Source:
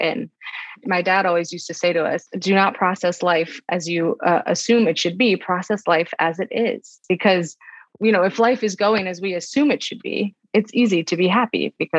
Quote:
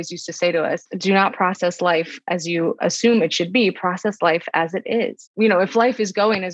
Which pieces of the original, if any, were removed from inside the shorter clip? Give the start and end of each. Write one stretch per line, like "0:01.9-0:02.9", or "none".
0:04.2-0:04.4
0:06.9-0:07.8